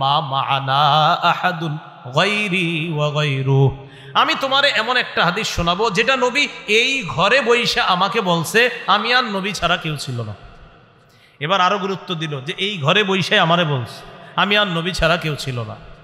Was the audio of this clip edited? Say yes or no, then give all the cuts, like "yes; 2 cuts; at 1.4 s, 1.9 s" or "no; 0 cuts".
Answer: no; 0 cuts